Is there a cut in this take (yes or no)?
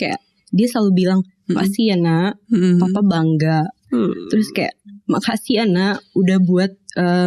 no